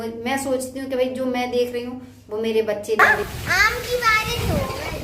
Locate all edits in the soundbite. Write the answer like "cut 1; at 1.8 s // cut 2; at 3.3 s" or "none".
cut 1; at 3.0 s